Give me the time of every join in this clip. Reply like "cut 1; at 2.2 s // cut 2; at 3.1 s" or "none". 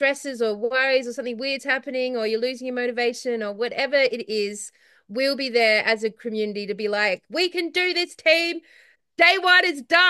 none